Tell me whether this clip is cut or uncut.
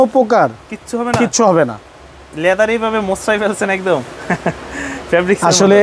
uncut